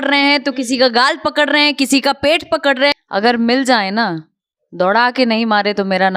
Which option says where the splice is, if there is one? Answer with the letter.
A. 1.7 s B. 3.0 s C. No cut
B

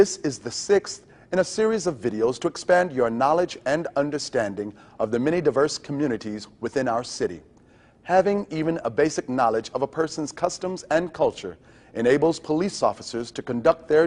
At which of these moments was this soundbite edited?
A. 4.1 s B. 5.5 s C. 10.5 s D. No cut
A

